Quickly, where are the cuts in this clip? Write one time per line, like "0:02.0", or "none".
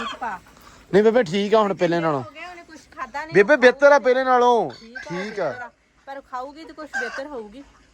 none